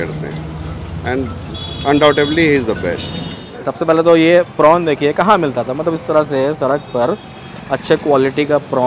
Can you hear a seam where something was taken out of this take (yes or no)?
yes